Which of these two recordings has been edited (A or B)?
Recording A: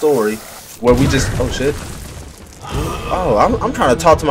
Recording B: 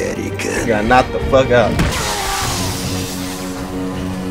B